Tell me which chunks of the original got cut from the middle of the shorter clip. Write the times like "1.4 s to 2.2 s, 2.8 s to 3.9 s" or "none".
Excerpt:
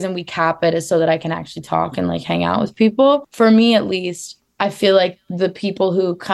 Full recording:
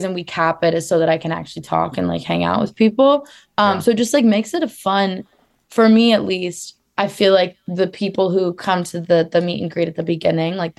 3.3 s to 5.7 s